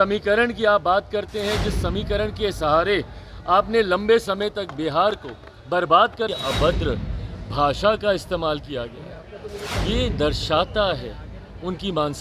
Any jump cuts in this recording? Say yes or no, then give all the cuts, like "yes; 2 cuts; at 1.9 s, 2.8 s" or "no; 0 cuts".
yes; 1 cut; at 6.3 s